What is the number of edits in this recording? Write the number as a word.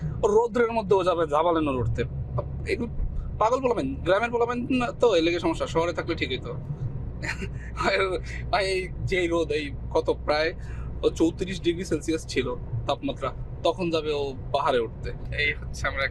zero